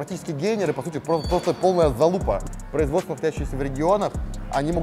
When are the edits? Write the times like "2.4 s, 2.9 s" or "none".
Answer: 2.5 s